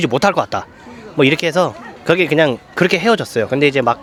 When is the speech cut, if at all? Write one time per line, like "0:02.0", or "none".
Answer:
none